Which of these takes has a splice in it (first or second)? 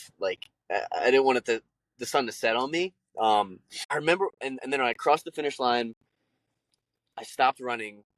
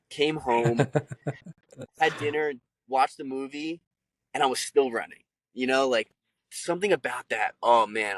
first